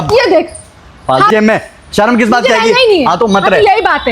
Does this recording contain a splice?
yes; 1 cut; at 1.3 s

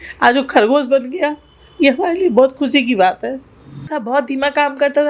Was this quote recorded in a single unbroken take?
no; 1 cut; at 3.9 s

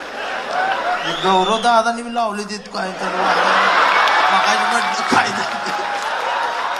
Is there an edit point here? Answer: no; 0 cuts

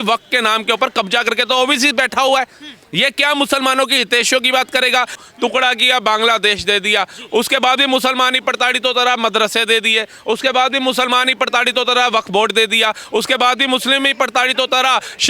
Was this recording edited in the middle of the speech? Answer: yes; 1 cut; at 5.2 s

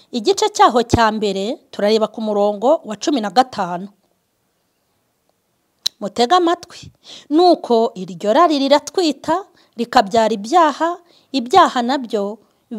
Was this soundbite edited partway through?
no; 0 cuts

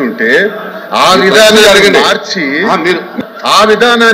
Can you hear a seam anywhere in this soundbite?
yes; 1 cut; at 3.1 s

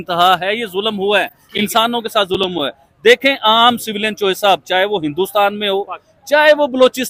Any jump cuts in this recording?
no; 0 cuts

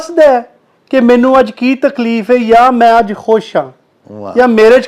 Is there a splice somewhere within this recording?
no; 0 cuts

